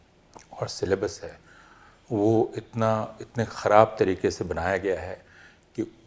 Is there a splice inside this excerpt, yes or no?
no